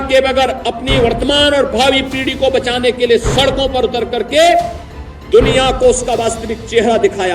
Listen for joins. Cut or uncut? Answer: uncut